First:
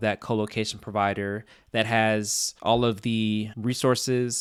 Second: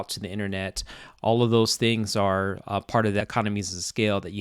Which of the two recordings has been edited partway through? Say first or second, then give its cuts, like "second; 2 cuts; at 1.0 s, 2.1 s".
second; 1 cut; at 3.2 s